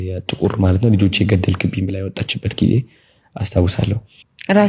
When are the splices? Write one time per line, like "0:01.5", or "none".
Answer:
none